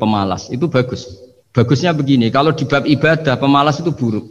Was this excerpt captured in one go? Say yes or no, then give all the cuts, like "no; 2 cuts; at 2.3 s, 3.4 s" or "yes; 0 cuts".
yes; 0 cuts